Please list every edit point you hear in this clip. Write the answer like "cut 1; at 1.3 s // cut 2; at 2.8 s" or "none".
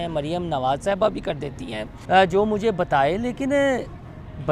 cut 1; at 1.9 s